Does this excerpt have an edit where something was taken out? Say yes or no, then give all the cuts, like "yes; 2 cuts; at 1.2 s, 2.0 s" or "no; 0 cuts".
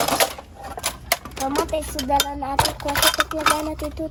no; 0 cuts